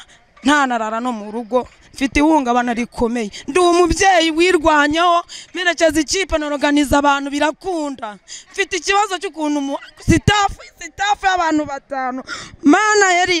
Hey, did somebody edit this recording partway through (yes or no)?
no